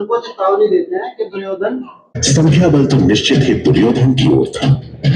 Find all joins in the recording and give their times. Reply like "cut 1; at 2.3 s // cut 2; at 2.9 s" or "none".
cut 1; at 2.2 s